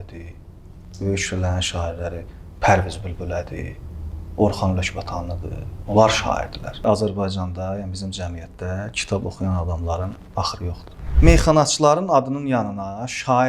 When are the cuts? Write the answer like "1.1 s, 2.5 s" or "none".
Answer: 6.8 s, 11.0 s